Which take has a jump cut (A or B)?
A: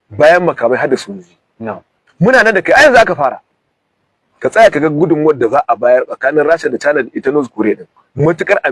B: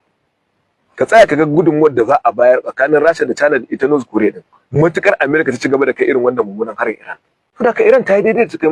B